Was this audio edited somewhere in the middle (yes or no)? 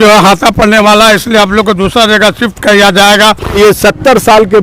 yes